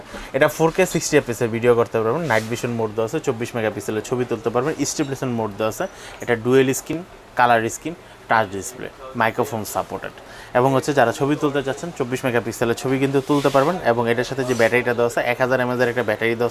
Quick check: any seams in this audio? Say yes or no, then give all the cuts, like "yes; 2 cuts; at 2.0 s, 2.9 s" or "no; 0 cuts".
no; 0 cuts